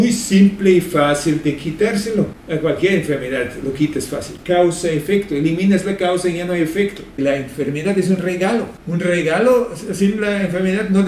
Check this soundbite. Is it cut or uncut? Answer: cut